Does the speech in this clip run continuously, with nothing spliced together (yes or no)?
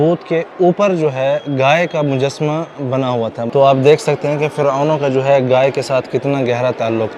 no